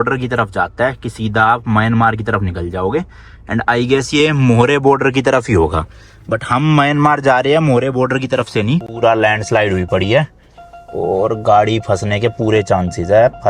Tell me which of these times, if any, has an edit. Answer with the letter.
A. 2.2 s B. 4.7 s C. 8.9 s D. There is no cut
C